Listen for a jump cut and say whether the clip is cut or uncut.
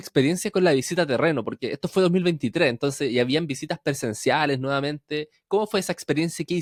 uncut